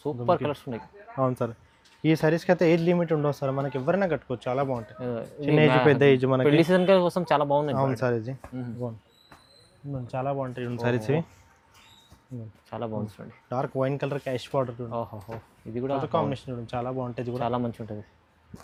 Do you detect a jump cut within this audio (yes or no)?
no